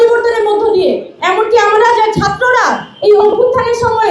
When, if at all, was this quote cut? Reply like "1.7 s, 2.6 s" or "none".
1.1 s